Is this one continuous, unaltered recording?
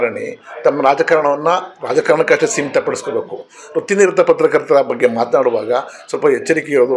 yes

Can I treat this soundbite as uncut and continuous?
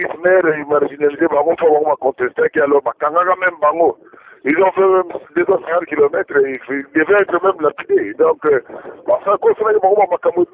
yes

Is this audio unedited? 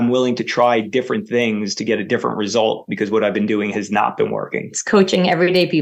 yes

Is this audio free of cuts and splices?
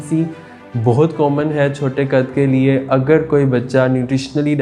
yes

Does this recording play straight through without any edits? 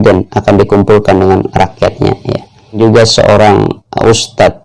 no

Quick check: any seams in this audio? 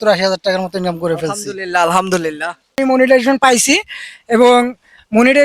yes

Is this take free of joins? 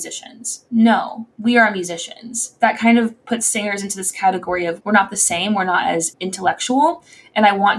no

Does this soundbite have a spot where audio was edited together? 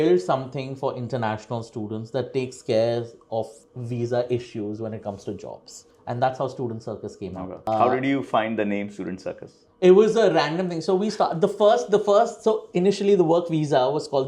no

